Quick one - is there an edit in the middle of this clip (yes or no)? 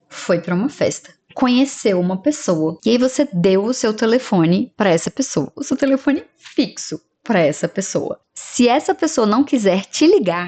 no